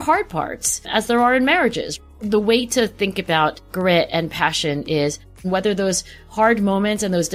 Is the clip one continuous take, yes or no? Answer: no